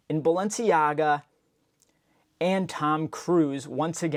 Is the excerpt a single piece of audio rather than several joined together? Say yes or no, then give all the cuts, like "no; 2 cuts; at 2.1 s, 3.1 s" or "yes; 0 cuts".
yes; 0 cuts